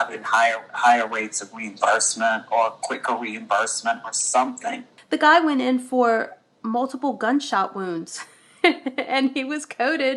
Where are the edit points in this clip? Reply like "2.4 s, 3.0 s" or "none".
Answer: 4.9 s